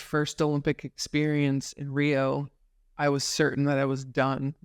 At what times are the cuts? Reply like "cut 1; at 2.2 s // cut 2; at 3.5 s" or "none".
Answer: none